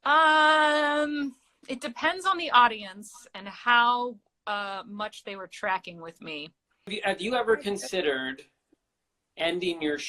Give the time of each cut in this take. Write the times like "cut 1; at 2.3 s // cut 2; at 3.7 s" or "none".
cut 1; at 6.9 s // cut 2; at 8.6 s